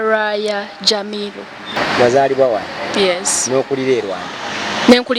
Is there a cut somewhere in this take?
yes; 1 cut; at 1.8 s

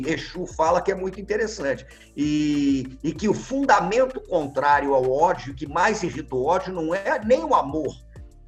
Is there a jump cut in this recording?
no; 0 cuts

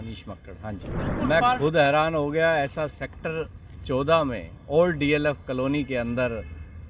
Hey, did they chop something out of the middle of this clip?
yes; 1 cut; at 1.2 s

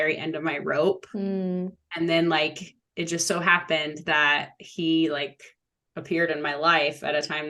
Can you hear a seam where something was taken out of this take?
no; 0 cuts

